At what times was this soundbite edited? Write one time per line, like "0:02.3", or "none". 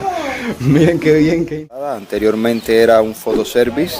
0:01.6